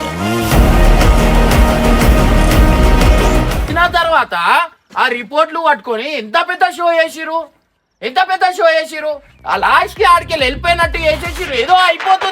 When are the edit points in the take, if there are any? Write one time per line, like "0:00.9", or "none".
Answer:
0:03.7